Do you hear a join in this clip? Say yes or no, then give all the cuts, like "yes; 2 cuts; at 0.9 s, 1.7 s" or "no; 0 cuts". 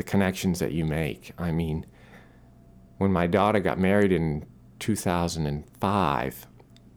no; 0 cuts